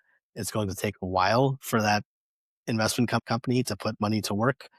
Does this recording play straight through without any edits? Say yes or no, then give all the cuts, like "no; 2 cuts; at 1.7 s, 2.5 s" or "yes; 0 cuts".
no; 1 cut; at 3.2 s